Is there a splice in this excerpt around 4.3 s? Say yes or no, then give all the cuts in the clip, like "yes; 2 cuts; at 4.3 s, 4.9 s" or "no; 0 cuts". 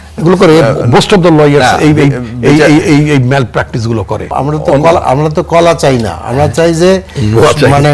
yes; 1 cut; at 4.3 s